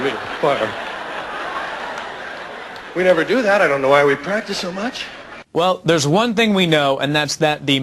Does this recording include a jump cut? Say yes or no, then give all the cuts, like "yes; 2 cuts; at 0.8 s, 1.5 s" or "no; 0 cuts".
no; 0 cuts